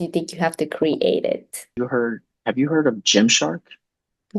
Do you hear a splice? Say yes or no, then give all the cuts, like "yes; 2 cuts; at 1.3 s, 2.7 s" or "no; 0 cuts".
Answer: yes; 1 cut; at 1.8 s